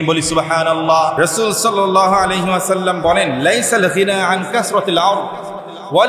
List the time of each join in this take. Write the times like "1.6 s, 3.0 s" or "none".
1.1 s